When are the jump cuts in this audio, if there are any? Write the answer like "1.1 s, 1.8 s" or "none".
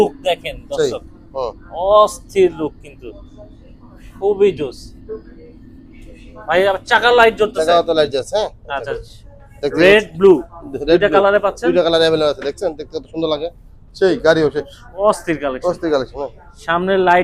none